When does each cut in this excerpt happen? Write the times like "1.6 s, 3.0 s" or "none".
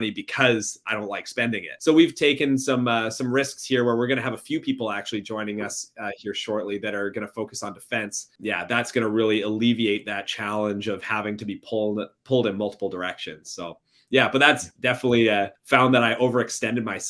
none